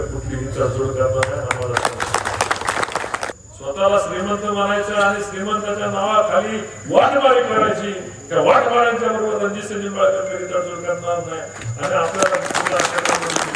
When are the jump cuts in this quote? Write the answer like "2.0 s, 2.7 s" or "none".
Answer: 3.2 s